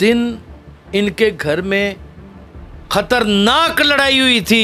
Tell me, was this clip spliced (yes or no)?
no